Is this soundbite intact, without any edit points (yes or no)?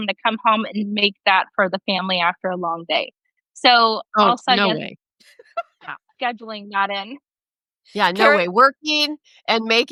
yes